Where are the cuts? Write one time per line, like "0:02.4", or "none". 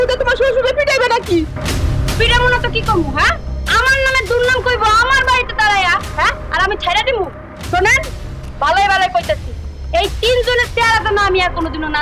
none